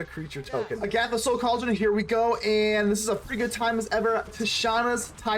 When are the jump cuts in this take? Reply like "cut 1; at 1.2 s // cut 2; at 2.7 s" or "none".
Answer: cut 1; at 0.8 s // cut 2; at 4.4 s